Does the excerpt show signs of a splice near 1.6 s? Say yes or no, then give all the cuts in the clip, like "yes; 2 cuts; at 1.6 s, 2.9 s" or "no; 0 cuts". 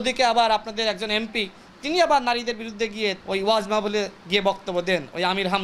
no; 1 cut; at 3.2 s